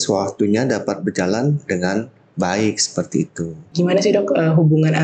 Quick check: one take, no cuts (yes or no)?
no